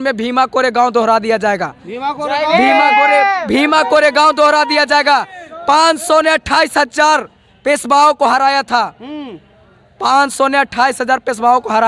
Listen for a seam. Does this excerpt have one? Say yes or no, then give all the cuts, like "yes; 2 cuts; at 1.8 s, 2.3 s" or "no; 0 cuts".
no; 0 cuts